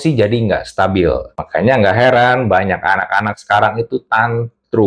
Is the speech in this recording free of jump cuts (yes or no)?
no